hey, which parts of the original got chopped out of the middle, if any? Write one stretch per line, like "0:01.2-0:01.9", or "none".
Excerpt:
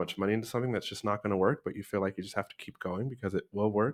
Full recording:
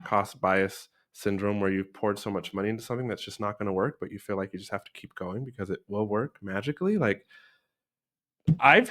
none